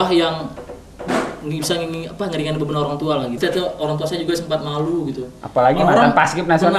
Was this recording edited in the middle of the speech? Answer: yes; 1 cut; at 3.4 s

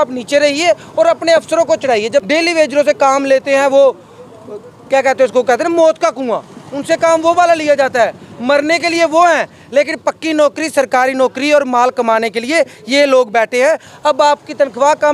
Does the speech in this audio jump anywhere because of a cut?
yes; 2 cuts; at 2.3 s, 13.9 s

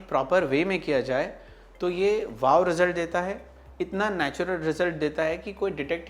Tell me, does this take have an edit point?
no; 0 cuts

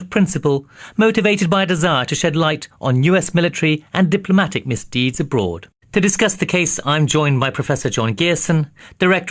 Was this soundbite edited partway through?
yes; 1 cut; at 6.0 s

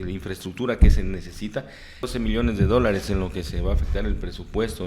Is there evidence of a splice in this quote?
yes; 1 cut; at 2.1 s

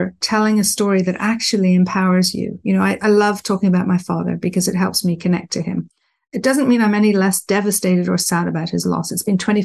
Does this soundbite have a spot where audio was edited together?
no; 0 cuts

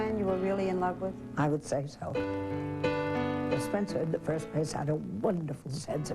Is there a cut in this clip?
yes; 1 cut; at 4.7 s

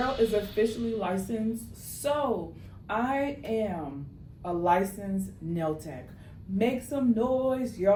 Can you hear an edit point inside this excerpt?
no; 0 cuts

